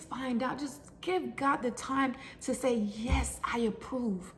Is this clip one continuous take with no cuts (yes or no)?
yes